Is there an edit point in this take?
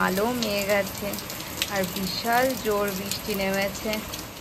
no; 0 cuts

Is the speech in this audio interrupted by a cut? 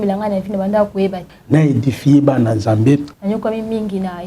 yes; 2 cuts; at 1.3 s, 3.1 s

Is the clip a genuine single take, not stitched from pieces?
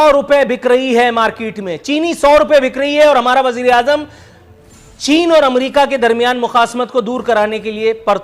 yes; 0 cuts

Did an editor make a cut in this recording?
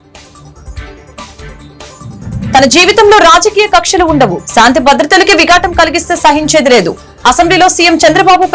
no; 0 cuts

